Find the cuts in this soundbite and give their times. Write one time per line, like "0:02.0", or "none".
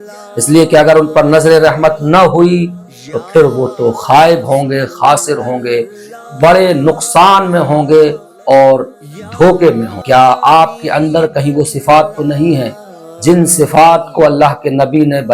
0:09.9